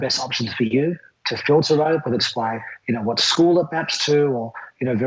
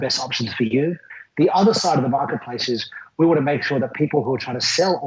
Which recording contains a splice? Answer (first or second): second